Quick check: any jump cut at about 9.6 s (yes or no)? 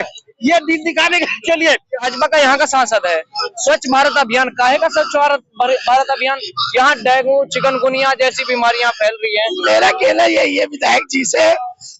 yes